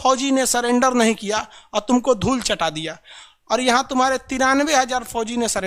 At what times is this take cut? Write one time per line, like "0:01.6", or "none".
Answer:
none